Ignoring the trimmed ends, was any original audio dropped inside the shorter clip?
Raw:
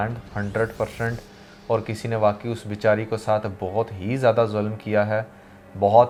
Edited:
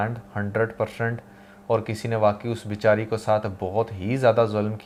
no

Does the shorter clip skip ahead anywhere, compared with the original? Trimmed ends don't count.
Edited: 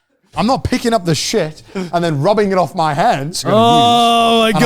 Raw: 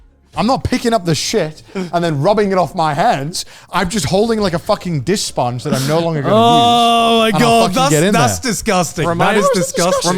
yes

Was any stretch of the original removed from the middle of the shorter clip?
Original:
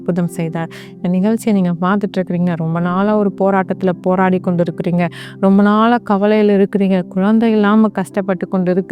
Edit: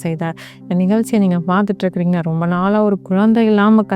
yes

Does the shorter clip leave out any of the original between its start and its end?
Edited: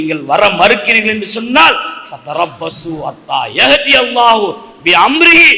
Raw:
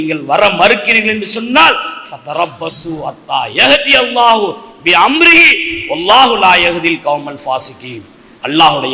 no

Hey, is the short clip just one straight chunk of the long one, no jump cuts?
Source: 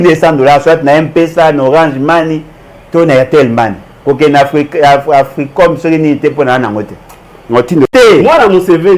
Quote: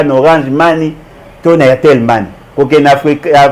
yes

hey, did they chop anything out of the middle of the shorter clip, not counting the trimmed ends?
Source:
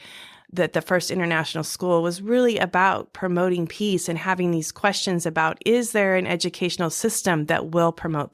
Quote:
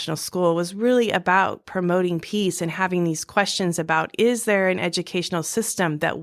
no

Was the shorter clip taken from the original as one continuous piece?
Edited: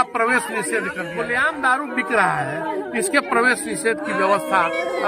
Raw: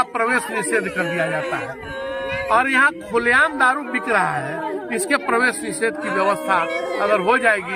no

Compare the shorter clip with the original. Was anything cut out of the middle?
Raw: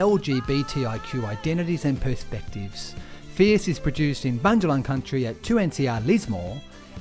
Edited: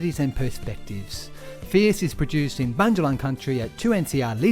no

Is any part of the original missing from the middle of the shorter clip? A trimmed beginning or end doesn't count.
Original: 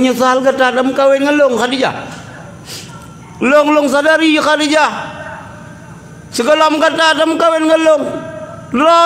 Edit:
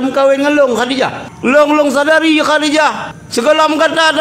yes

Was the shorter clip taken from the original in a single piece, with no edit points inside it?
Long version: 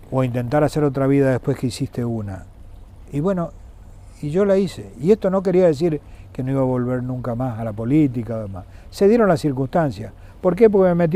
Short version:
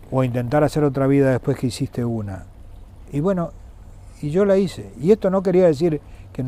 yes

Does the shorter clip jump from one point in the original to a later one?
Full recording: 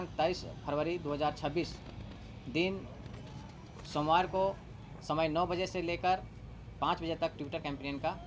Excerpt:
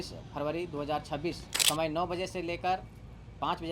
yes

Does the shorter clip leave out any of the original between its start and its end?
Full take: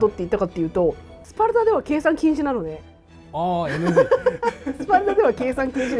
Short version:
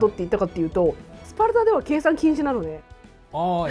no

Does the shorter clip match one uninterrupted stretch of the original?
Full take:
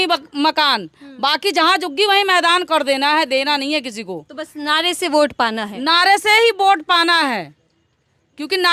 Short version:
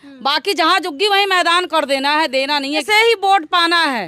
no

